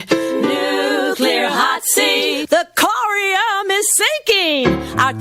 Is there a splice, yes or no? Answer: no